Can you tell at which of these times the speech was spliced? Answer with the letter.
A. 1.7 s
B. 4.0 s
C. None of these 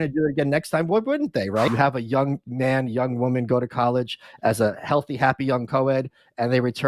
A